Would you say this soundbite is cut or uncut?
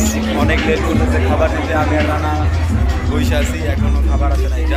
uncut